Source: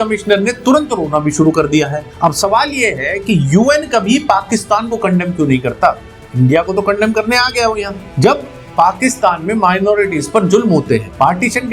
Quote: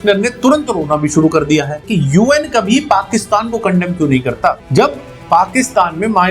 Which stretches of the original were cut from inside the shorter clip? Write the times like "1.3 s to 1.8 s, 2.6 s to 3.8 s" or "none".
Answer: 2.0 s to 3.2 s, 6.0 s to 8.1 s